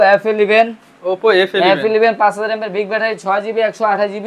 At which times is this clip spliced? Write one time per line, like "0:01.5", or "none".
none